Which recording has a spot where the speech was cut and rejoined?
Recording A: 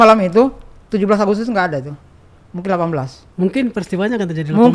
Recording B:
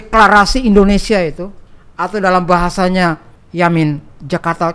B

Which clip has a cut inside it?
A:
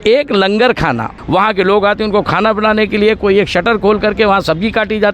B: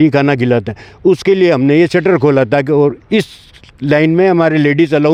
A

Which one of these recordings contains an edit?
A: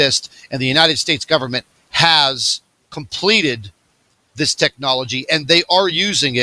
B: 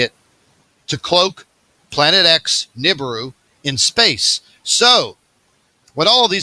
B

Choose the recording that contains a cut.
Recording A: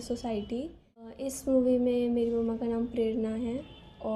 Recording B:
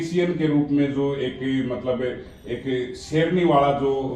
A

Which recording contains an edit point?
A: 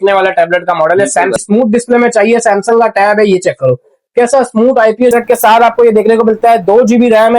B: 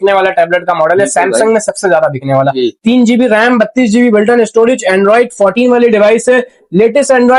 A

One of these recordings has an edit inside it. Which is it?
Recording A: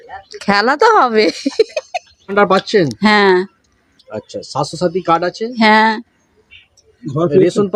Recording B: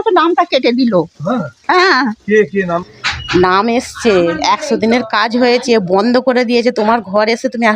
B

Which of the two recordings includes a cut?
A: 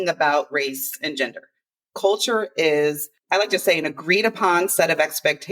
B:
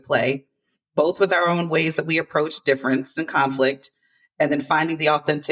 A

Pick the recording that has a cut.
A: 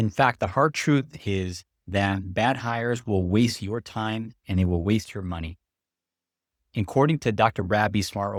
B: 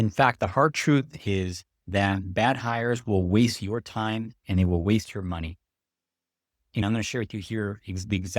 B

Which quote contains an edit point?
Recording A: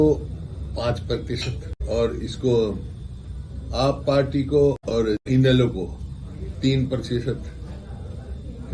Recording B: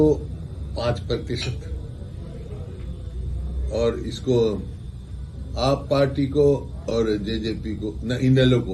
A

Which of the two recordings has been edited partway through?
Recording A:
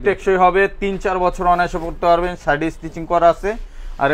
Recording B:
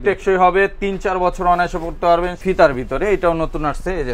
B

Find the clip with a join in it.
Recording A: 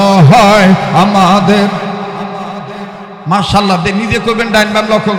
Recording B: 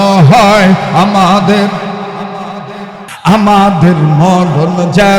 B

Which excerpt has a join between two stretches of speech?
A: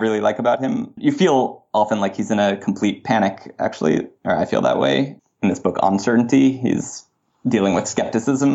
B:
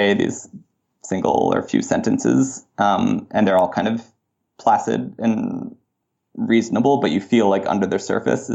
A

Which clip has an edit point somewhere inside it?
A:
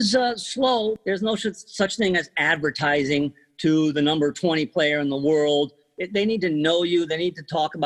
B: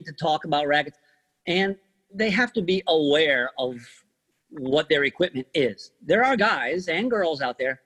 A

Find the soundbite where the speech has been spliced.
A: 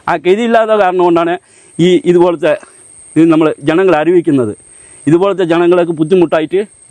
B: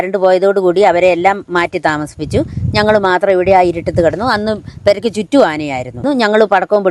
B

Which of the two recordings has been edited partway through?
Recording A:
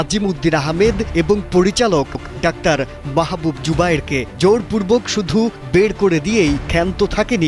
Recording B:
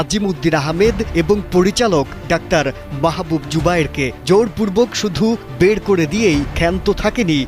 B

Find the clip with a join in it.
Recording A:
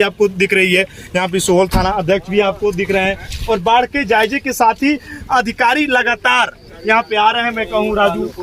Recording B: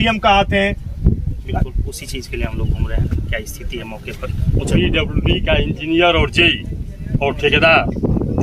B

